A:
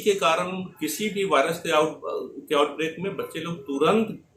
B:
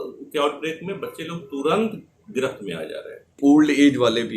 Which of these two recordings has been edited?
B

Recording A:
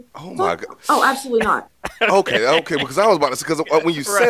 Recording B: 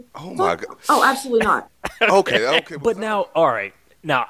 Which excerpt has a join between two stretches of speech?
B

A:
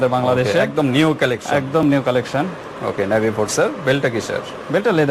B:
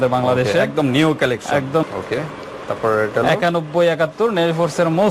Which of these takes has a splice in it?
B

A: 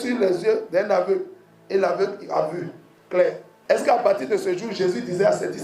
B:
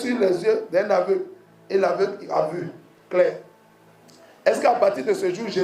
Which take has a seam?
A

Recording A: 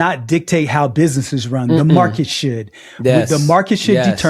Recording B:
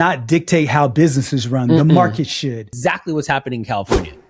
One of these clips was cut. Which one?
B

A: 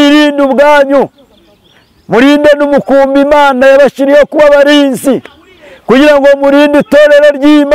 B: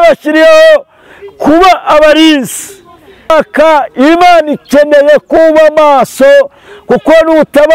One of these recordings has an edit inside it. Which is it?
B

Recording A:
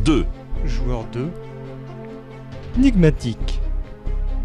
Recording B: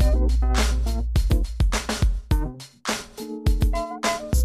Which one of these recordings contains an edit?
B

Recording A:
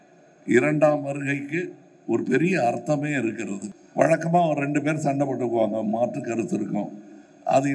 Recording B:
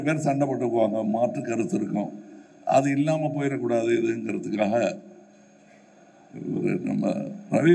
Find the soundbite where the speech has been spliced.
A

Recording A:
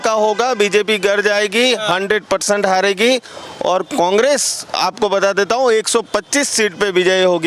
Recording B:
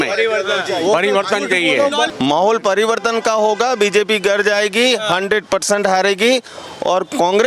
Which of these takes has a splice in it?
B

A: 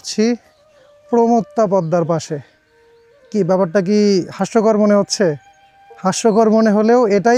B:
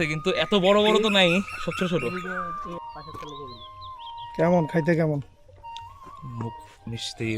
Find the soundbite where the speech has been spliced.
B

